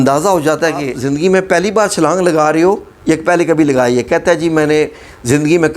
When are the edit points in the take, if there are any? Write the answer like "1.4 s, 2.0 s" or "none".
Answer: 1.0 s

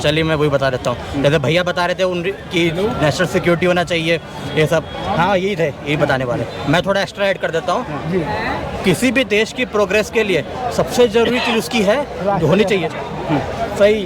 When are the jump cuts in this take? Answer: none

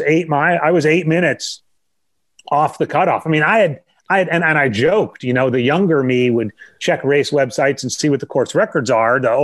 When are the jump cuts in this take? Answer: none

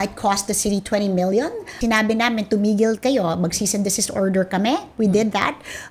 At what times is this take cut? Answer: 1.8 s

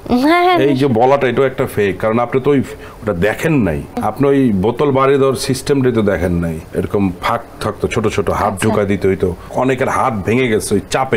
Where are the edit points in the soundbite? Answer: 4.0 s, 6.5 s, 9.4 s

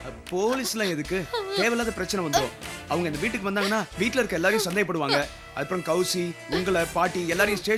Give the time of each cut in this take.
none

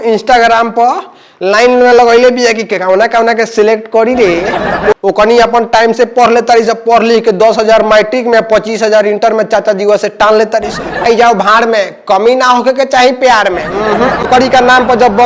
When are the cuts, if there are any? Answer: 4.9 s, 11.0 s, 14.2 s

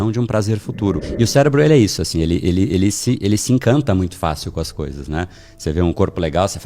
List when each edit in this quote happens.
1.1 s

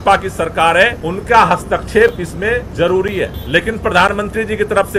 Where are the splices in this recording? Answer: 1.0 s, 2.7 s, 3.4 s

